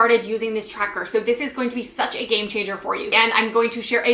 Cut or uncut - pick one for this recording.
cut